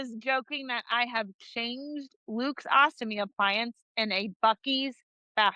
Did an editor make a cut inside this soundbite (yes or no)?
no